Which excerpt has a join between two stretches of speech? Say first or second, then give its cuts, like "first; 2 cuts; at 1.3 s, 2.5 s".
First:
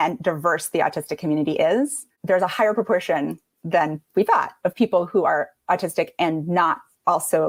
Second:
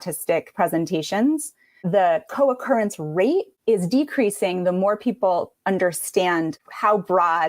second; 2 cuts; at 1.8 s, 3.5 s